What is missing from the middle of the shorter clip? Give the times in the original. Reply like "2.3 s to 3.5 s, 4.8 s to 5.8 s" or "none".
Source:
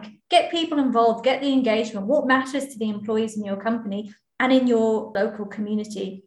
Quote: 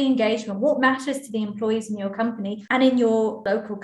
4.1 s to 4.3 s